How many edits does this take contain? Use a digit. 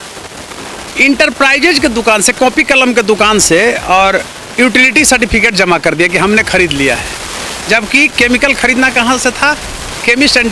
0